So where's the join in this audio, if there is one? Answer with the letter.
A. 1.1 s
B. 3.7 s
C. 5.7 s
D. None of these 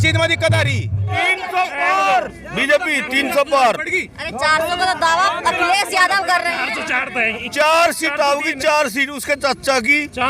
A